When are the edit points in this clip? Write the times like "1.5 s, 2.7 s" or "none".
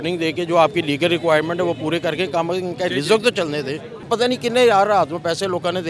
4.1 s